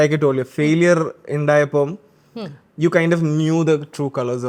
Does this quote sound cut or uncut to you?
uncut